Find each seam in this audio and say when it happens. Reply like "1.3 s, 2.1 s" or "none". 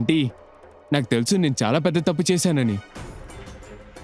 2.8 s